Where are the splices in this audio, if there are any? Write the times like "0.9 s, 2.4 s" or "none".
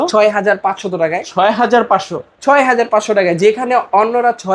none